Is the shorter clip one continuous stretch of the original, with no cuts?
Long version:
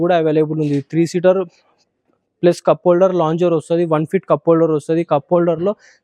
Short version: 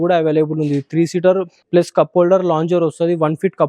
no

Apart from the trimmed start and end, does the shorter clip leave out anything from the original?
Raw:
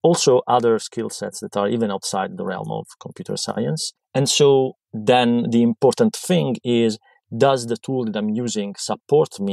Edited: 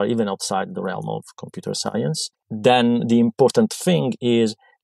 yes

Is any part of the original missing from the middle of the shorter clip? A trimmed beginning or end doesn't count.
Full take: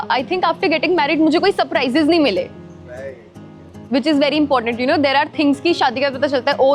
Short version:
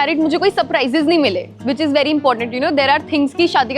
yes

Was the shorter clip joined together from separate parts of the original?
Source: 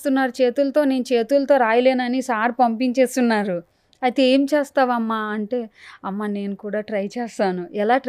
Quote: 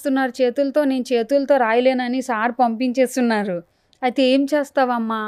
no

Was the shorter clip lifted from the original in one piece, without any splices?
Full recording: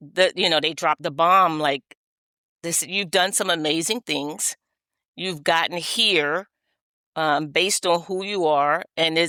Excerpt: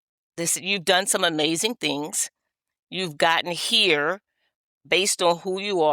no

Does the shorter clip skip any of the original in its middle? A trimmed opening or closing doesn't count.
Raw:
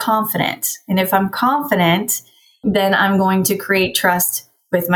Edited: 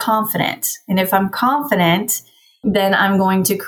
no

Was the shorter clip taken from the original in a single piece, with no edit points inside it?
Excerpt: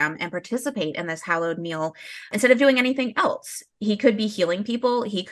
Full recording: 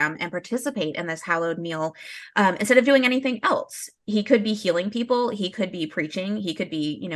no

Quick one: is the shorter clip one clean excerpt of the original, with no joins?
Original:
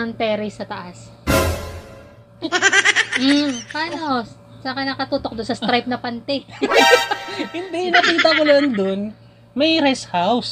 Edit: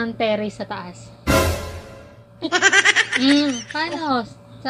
yes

